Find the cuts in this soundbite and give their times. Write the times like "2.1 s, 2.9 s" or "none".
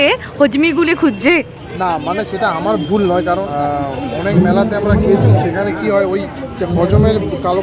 none